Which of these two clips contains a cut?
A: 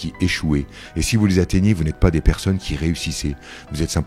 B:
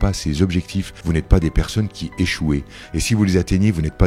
B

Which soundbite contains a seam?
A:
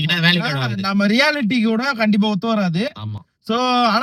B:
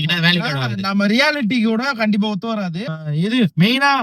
B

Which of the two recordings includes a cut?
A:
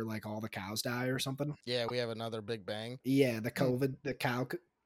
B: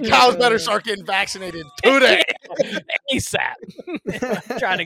A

